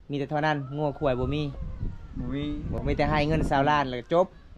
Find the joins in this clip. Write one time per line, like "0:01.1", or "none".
0:02.8